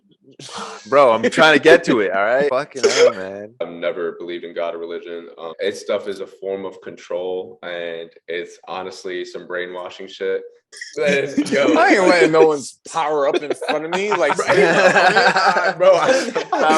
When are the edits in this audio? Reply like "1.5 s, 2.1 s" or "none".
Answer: 2.5 s, 3.5 s, 5.5 s, 10.7 s